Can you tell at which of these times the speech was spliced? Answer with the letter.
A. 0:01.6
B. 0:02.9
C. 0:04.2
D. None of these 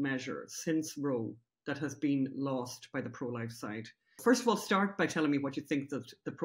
C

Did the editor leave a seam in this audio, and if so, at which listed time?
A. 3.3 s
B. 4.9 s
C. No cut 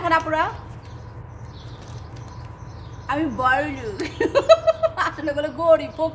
C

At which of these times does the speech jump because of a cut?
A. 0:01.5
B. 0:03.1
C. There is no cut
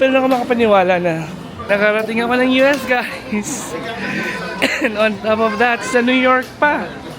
A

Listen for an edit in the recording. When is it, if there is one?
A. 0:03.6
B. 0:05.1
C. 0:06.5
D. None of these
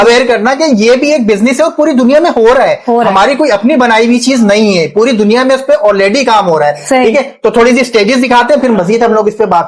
D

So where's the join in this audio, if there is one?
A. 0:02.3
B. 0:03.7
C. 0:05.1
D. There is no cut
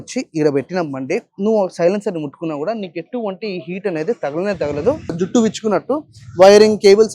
C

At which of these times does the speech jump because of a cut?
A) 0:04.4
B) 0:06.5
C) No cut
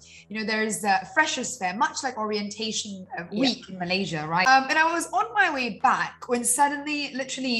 A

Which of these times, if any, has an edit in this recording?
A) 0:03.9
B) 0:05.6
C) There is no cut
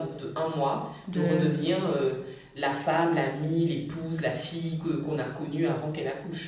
C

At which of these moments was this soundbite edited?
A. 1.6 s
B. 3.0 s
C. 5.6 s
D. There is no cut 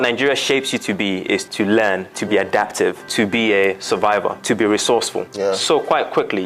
B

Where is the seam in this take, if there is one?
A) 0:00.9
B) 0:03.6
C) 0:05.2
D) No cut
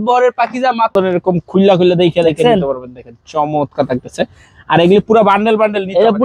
A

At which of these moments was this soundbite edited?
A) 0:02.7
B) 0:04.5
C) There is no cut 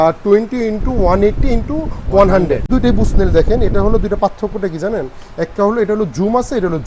A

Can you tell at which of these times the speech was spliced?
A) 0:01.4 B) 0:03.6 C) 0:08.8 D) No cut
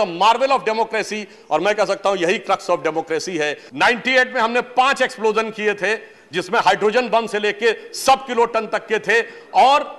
B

